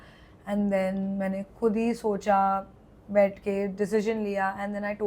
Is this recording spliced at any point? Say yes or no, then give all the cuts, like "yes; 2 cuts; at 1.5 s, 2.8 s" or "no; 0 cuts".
no; 0 cuts